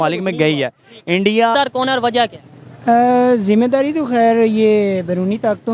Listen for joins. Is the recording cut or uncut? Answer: cut